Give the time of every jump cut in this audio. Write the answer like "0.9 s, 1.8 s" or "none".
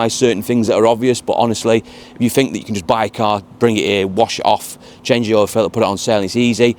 none

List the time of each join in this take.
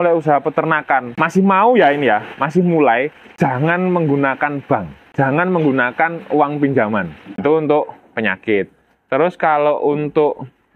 1.2 s, 3.2 s, 5.0 s, 7.3 s

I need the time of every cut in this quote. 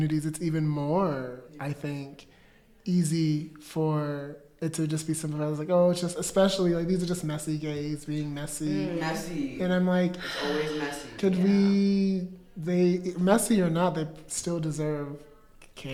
none

